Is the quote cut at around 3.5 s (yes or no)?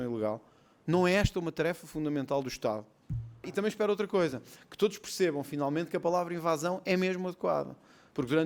yes